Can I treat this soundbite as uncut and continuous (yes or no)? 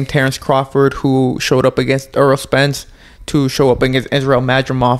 yes